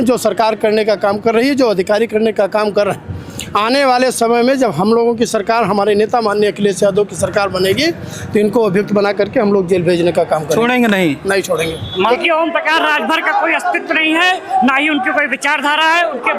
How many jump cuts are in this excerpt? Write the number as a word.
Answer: one